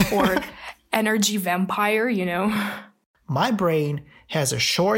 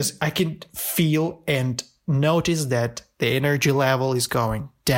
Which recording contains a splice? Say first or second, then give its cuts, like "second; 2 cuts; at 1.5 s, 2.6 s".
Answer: first; 1 cut; at 2.8 s